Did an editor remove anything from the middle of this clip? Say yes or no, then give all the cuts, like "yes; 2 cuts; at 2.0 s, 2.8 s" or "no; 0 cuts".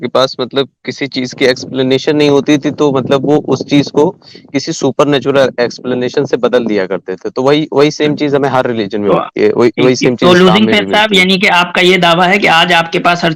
no; 0 cuts